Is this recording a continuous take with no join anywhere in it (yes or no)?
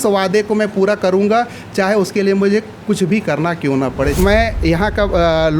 no